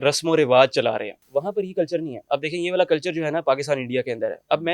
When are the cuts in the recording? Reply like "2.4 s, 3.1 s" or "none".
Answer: 1.1 s

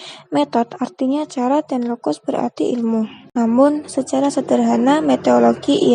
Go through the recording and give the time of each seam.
3.2 s

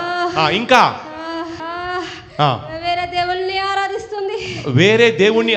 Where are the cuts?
1.5 s

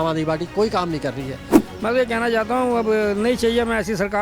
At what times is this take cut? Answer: 1.7 s

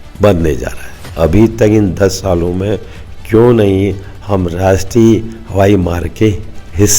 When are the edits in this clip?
1.1 s

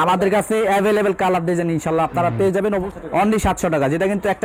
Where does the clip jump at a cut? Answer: 2.9 s

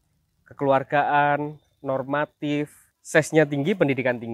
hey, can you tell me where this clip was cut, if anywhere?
2.9 s

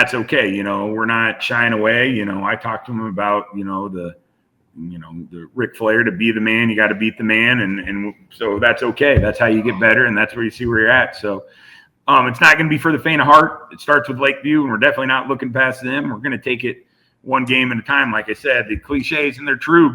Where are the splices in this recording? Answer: 1.5 s

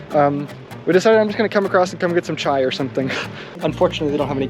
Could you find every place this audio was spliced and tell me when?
3.5 s

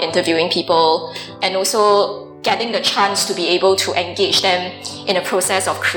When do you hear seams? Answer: 2.3 s

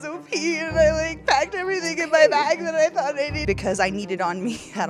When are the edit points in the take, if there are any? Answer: 3.4 s

